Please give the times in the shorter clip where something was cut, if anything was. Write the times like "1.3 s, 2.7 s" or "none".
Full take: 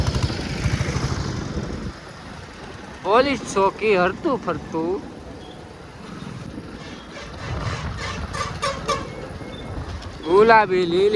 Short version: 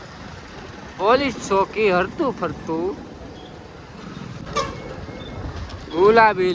4.5 s